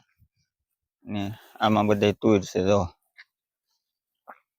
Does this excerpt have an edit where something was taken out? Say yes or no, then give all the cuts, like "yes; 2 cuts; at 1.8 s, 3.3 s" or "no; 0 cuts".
no; 0 cuts